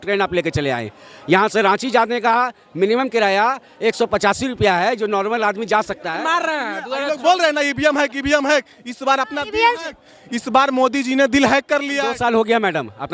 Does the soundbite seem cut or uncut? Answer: cut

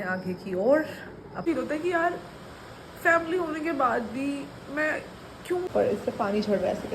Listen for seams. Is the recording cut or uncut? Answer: cut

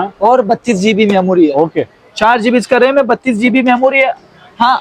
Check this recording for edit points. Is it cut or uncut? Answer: uncut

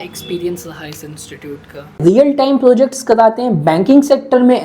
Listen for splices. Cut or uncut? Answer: cut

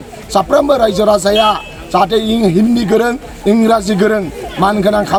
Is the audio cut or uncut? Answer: uncut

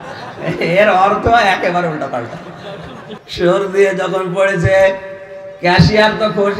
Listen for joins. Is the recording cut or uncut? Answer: cut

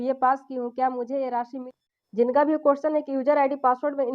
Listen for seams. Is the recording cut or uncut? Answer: cut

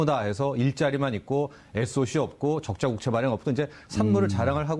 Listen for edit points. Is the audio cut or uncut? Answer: cut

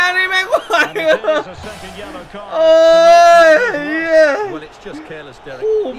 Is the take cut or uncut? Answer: uncut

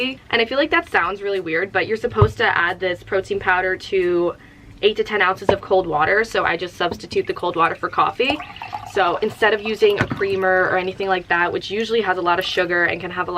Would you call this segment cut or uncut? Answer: cut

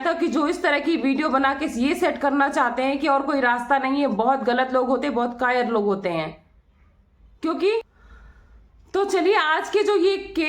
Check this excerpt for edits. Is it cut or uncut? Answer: cut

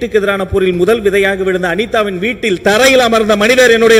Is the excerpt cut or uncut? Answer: uncut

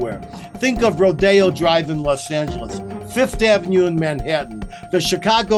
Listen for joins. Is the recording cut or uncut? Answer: uncut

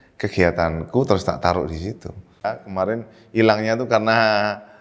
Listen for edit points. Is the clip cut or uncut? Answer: cut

